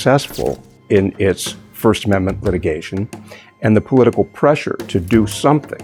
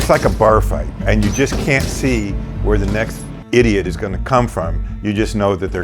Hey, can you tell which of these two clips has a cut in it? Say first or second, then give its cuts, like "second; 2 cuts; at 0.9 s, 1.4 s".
second; 1 cut; at 1.0 s